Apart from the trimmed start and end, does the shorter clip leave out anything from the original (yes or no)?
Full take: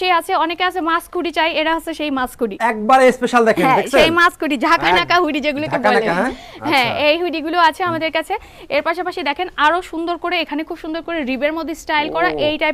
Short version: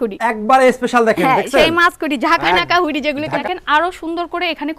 yes